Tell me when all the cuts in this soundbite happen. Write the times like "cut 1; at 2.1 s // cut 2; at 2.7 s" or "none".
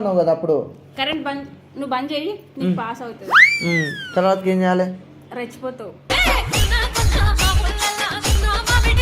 none